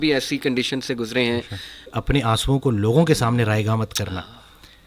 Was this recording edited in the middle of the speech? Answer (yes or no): yes